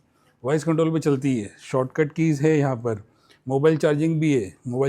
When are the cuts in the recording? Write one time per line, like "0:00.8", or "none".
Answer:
none